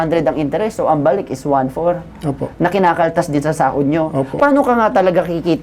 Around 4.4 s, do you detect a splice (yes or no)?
yes